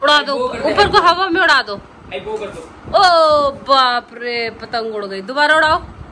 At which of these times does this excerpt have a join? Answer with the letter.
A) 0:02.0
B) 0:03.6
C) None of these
C